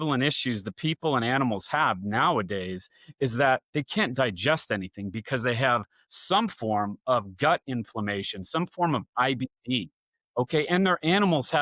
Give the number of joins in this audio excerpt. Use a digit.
0